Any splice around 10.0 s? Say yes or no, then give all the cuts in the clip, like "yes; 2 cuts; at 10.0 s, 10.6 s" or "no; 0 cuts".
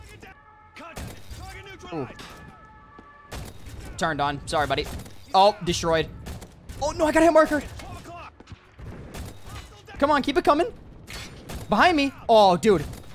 yes; 2 cuts; at 2.2 s, 10.0 s